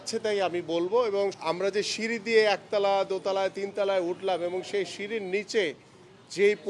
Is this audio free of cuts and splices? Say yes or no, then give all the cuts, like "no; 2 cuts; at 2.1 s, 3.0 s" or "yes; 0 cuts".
no; 1 cut; at 1.4 s